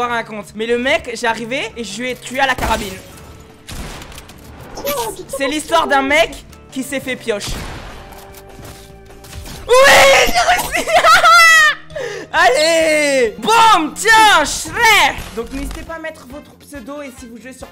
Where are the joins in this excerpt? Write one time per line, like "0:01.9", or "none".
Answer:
0:15.3